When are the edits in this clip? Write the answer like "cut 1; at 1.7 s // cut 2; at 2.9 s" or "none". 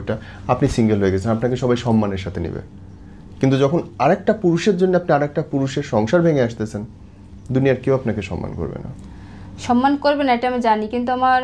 none